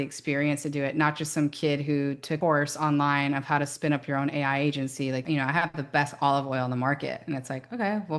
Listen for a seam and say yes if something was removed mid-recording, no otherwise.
yes